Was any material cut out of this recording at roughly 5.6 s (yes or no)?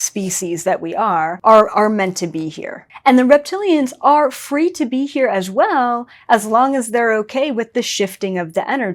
no